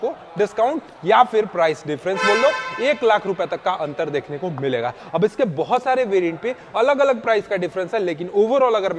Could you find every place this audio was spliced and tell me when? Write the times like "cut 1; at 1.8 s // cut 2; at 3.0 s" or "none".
none